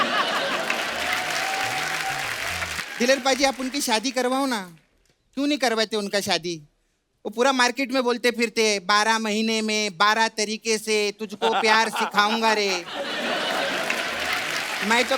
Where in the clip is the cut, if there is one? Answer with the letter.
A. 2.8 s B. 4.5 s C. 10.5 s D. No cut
A